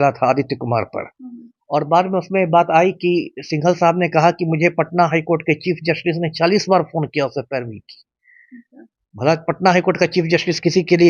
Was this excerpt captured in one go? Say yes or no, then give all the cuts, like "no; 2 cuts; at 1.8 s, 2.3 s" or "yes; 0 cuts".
yes; 0 cuts